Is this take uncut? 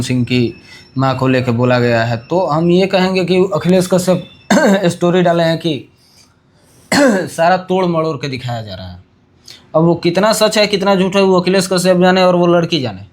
yes; 0 cuts

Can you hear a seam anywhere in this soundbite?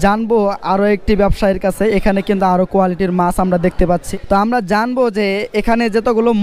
yes; 1 cut; at 4.1 s

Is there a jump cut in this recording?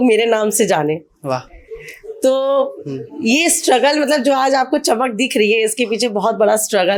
no; 0 cuts

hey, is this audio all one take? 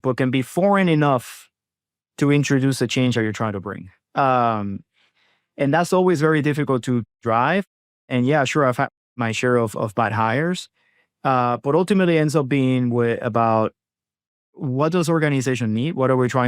no; 1 cut; at 14.6 s

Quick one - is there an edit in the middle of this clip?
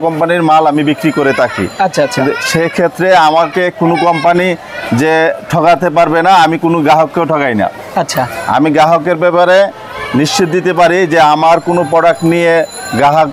no; 0 cuts

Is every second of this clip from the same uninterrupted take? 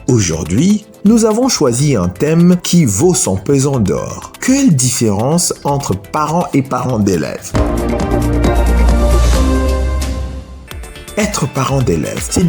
no; 2 cuts; at 7.4 s, 10.5 s

